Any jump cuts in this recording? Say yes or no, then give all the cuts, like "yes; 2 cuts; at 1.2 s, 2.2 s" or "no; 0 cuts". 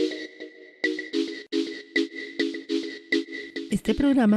yes; 1 cut; at 1.4 s